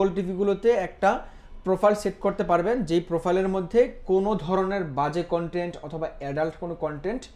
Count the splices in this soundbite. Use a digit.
0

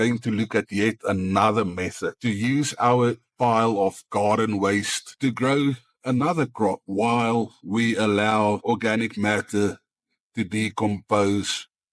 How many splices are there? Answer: 3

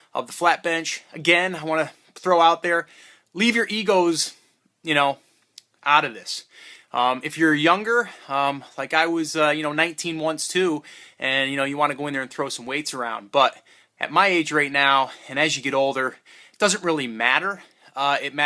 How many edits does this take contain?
0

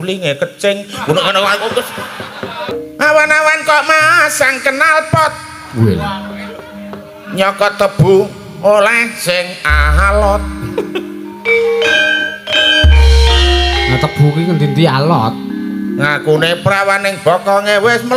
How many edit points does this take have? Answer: 1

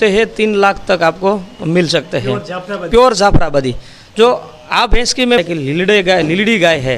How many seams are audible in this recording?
1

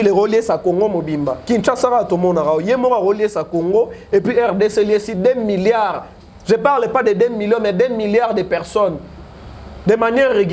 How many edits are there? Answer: 0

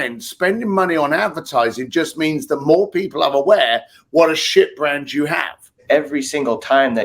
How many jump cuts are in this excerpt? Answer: 1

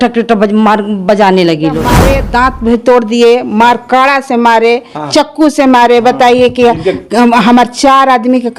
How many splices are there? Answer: 1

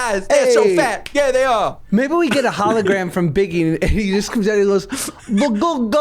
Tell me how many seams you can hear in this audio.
1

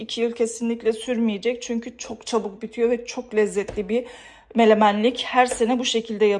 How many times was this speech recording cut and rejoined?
0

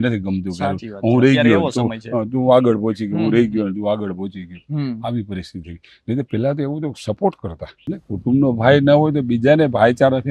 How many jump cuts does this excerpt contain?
1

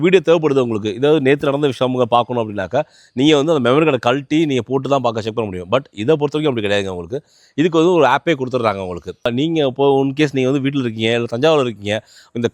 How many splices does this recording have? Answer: 1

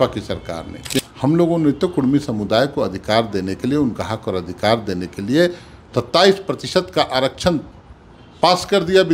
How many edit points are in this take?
1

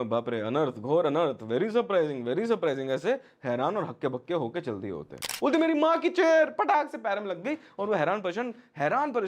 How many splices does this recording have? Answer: 1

